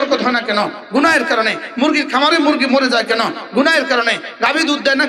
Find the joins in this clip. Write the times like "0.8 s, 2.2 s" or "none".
none